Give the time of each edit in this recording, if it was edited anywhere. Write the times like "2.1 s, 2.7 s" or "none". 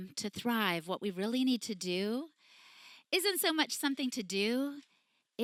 none

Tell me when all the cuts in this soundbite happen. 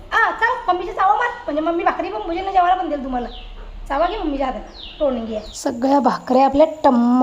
5.5 s

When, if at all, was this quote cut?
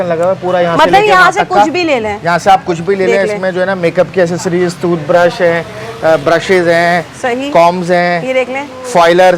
none

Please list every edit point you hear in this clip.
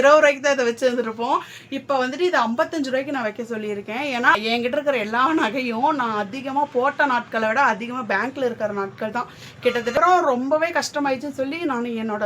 4.3 s, 10.0 s

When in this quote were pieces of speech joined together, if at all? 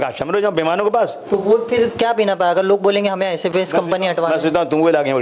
1.2 s

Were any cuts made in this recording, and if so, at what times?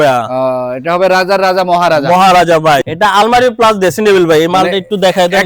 2.9 s

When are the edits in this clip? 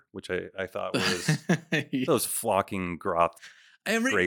none

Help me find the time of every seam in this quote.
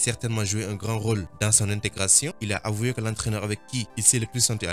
2.4 s

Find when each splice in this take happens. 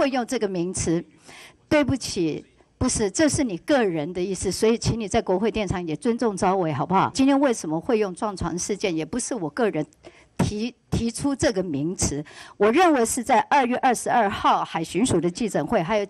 7.1 s

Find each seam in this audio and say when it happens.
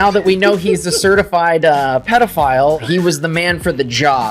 2.8 s

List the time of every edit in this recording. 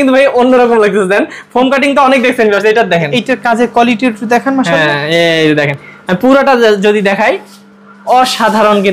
none

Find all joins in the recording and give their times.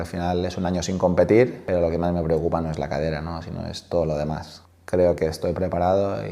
1.6 s, 4.7 s

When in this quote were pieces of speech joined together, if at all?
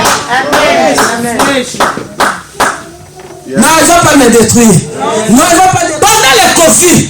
5.9 s

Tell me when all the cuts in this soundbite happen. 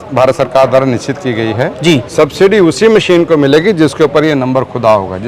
2.1 s

